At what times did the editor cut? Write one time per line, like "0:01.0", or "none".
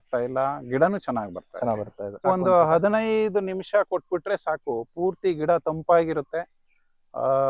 0:02.2